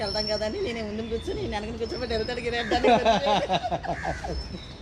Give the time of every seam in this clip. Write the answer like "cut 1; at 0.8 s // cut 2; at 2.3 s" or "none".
none